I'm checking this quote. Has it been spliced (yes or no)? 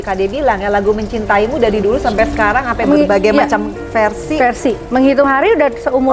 no